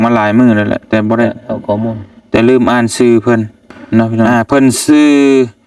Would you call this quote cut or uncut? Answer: cut